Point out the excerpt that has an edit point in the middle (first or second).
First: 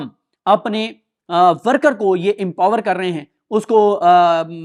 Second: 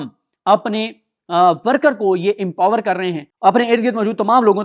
second